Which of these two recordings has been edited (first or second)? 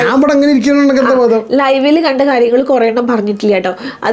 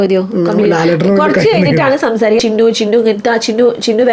second